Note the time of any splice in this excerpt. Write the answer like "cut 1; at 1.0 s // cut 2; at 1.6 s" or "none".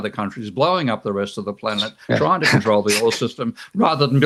none